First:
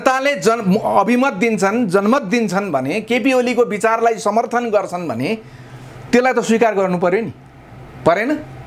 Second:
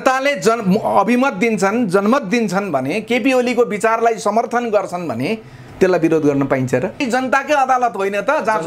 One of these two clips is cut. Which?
second; 2 cuts; at 5.6 s, 7.0 s

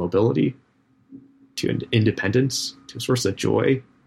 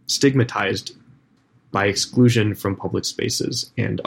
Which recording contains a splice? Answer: second; 1 cut; at 1.3 s

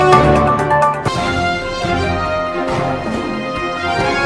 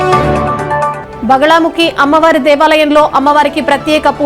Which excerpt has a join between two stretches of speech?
first; 1 cut; at 0.9 s

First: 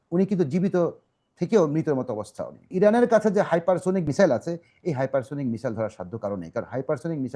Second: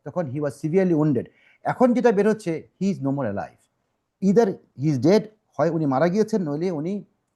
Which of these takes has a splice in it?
first; 2 cuts; at 2.7 s, 4.1 s

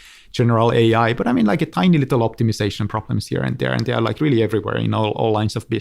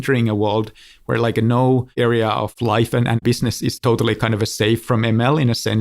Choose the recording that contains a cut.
second; 1 cut; at 4.8 s

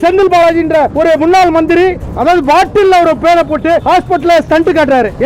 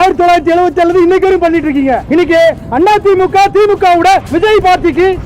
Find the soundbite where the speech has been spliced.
second; 1 cut; at 2.0 s

